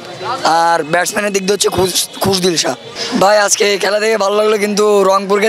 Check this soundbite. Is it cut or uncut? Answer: cut